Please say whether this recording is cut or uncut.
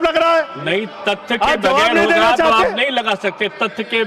uncut